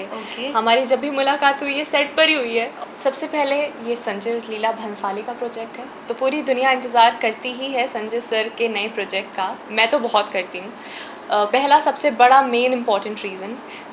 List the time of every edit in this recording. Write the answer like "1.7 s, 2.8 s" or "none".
2.7 s